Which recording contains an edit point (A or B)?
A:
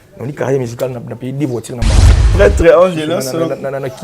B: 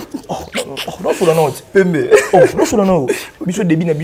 A